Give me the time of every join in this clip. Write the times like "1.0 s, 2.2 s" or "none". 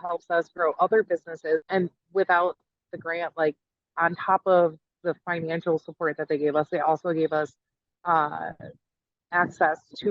1.7 s

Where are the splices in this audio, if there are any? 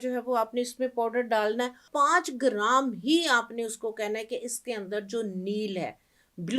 1.8 s

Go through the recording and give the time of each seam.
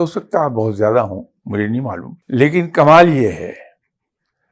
2.1 s

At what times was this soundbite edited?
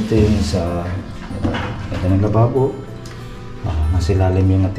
none

